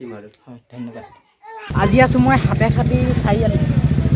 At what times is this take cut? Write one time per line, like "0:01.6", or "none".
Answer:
0:01.4